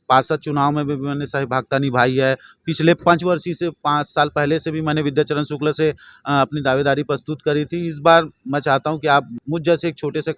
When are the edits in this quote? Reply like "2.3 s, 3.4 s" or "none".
9.4 s